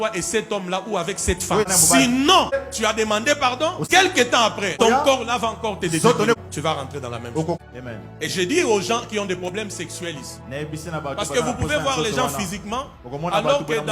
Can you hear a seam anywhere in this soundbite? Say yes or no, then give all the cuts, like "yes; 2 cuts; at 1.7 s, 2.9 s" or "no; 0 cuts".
yes; 6 cuts; at 1.7 s, 2.6 s, 3.9 s, 4.8 s, 6.4 s, 7.6 s